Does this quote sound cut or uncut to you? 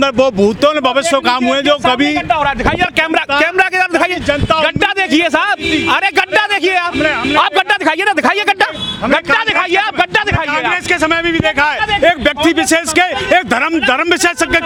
uncut